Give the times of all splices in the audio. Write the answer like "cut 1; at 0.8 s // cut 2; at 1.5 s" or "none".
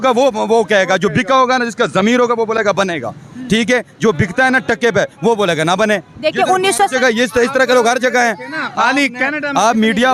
none